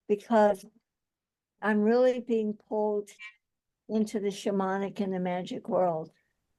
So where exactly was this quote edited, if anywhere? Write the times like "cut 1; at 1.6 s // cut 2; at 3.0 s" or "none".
cut 1; at 1.5 s